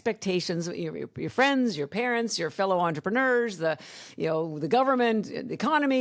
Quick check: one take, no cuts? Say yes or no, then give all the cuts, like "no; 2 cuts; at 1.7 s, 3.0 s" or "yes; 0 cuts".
yes; 0 cuts